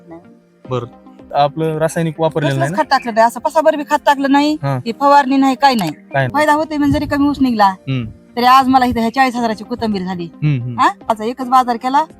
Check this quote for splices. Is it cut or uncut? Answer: cut